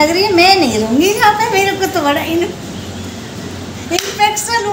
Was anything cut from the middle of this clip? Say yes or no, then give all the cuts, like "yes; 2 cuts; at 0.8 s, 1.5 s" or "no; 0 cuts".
no; 0 cuts